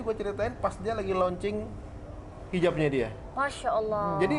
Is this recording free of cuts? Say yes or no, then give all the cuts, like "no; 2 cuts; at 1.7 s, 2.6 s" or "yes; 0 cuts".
yes; 0 cuts